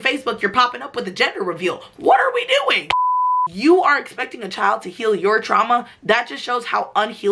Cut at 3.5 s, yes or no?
yes